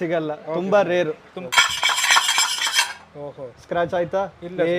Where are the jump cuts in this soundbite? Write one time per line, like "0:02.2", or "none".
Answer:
0:01.3